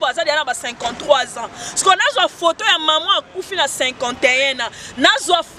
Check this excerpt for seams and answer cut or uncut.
uncut